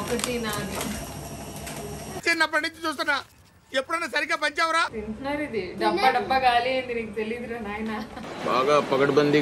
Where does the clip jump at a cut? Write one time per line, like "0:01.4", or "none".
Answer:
0:04.9